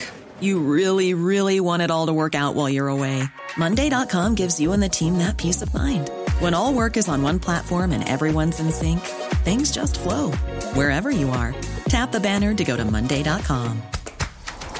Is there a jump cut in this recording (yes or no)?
no